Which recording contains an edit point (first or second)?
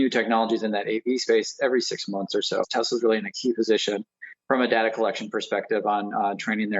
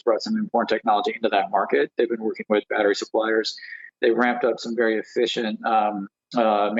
first